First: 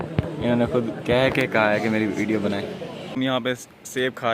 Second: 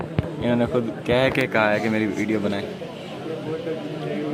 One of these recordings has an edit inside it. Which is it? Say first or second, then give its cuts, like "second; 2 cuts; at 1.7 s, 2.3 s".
first; 1 cut; at 3.2 s